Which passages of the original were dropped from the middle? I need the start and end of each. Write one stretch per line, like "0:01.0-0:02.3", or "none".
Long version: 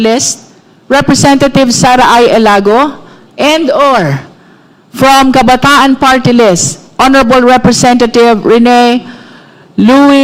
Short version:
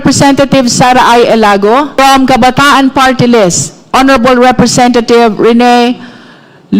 0:02.9-0:05.0